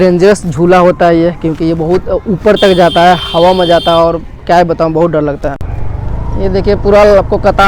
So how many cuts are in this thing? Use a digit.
1